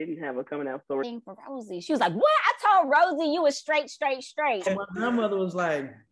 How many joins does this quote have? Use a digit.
2